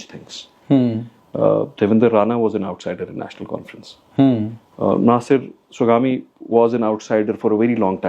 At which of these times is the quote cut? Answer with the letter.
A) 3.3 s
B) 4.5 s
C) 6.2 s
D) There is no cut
D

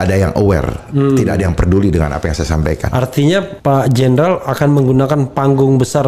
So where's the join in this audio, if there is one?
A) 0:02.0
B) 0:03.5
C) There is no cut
B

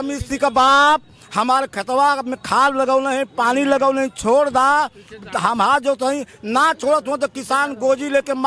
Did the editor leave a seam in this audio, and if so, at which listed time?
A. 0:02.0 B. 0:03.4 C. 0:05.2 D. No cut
D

